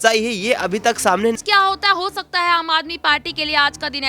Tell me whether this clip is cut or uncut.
cut